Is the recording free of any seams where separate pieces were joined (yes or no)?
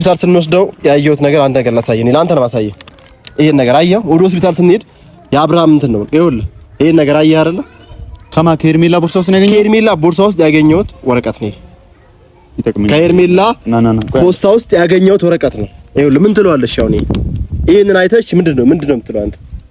yes